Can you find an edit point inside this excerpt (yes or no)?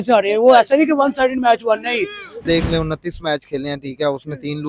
yes